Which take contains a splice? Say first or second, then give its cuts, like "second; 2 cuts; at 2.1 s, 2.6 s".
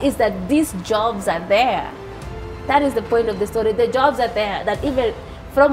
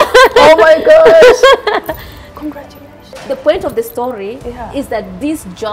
second; 1 cut; at 3.2 s